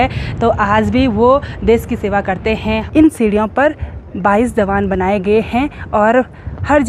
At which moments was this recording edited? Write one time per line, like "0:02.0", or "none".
0:02.8